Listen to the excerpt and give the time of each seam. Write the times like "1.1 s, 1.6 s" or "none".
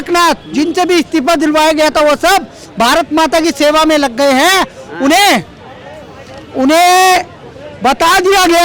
none